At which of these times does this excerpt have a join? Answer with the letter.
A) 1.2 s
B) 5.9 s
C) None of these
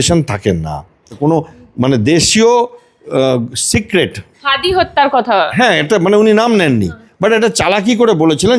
A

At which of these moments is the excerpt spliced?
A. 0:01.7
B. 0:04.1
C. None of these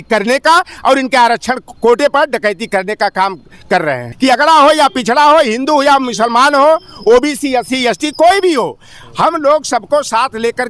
B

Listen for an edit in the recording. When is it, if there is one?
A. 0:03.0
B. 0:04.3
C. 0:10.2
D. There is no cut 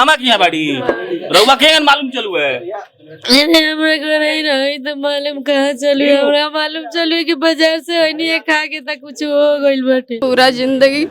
C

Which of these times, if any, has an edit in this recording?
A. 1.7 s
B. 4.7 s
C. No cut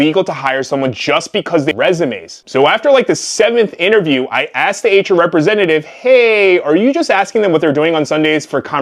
A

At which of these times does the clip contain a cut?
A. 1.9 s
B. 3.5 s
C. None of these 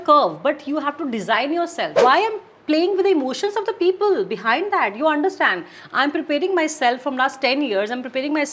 A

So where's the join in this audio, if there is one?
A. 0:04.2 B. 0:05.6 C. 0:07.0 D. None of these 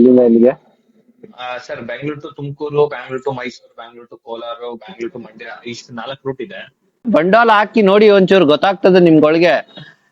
C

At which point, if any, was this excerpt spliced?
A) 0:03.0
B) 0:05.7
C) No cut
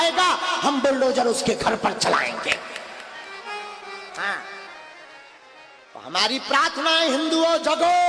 A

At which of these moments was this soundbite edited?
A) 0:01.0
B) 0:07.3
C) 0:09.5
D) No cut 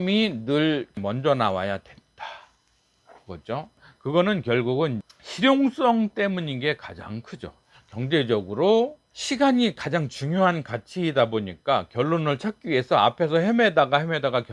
A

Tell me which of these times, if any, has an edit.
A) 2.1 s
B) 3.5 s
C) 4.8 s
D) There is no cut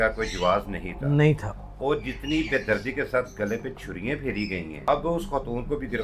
C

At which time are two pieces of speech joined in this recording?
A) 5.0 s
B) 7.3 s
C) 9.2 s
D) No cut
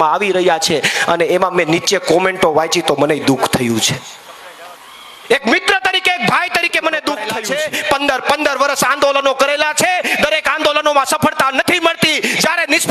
B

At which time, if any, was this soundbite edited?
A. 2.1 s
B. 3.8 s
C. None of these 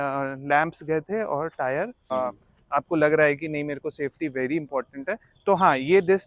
A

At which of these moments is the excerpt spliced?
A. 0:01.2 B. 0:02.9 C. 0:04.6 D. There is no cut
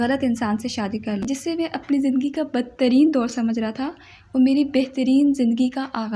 A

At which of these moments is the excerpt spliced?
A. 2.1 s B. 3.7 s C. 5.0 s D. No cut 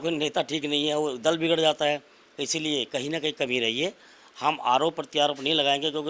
D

